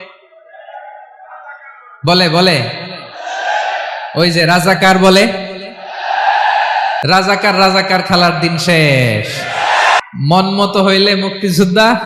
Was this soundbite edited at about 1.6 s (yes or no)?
no